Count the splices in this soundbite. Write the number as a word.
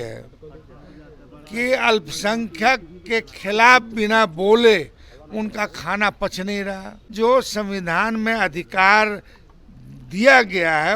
one